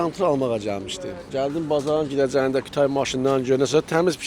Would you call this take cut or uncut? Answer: cut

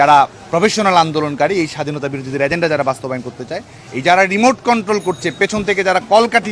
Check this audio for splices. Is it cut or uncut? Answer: uncut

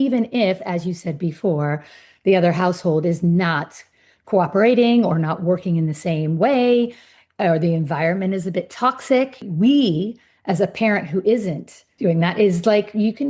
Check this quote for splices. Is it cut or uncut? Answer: cut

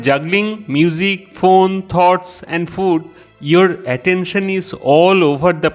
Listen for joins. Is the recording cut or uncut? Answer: uncut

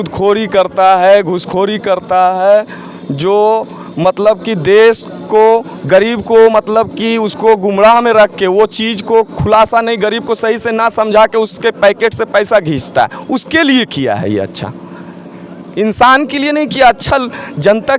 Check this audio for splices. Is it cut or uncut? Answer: uncut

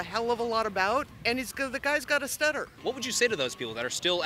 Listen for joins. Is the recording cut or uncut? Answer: cut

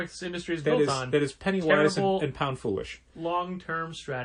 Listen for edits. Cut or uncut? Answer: uncut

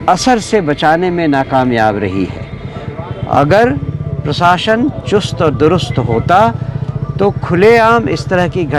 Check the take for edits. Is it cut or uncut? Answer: uncut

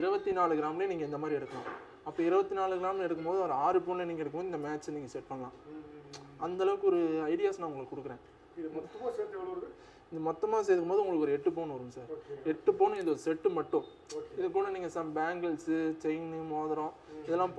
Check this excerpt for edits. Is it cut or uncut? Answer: uncut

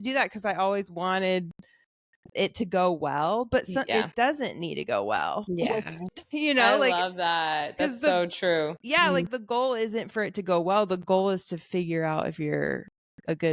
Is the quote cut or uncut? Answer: uncut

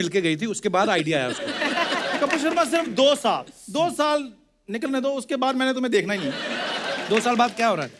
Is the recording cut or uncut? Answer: uncut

